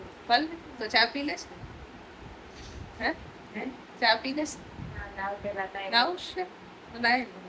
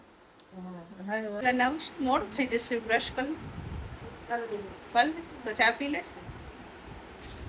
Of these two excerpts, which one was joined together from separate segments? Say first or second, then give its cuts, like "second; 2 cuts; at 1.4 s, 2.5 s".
second; 1 cut; at 1.4 s